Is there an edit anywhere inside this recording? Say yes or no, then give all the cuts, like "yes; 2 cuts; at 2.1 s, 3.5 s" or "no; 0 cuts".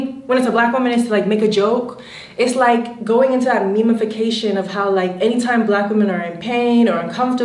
no; 0 cuts